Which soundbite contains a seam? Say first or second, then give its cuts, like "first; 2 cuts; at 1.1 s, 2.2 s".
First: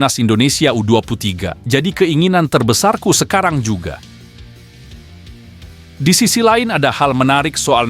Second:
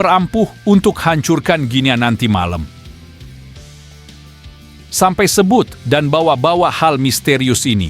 second; 2 cuts; at 2.7 s, 4.9 s